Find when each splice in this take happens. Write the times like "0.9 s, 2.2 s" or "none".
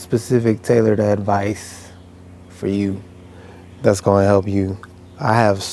none